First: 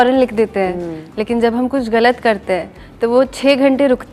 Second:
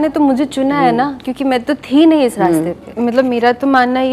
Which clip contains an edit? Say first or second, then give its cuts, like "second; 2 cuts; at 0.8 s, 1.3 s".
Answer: second; 1 cut; at 2.8 s